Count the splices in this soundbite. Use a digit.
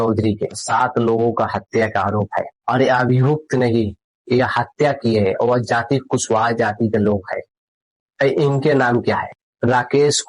1